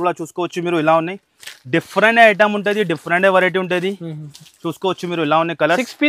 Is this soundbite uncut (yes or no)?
yes